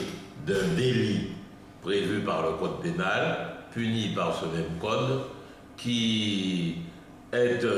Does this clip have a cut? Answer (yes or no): yes